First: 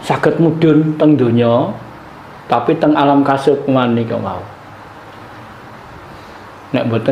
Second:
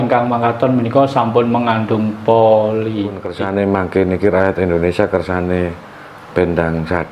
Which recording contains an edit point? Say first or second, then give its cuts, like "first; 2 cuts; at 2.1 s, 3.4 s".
second; 1 cut; at 3.3 s